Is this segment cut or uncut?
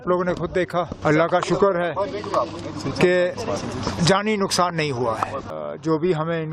cut